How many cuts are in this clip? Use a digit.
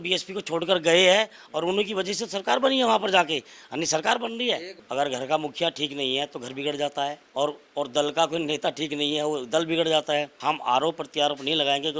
3